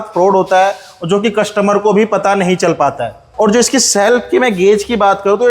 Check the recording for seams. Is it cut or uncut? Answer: cut